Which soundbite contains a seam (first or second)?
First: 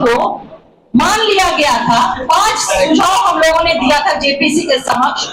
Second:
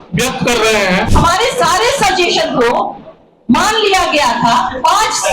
second